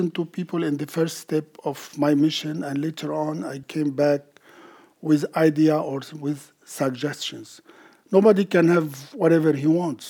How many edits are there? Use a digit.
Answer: 1